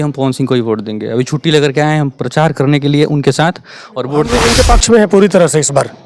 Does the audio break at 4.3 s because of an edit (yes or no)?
yes